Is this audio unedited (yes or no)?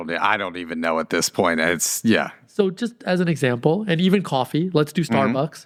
yes